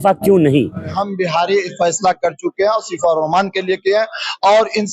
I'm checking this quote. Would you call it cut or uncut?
cut